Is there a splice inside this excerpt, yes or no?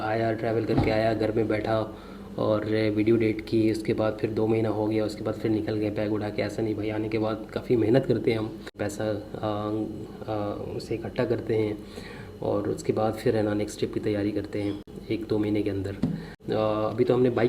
no